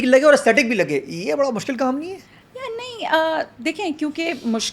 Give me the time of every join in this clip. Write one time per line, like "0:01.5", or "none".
none